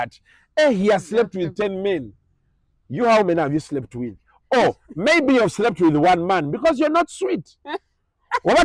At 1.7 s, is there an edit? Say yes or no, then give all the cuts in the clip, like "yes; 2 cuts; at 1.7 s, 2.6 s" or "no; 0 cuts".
no; 0 cuts